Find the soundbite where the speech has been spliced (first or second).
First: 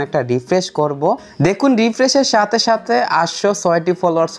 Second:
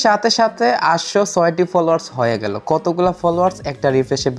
first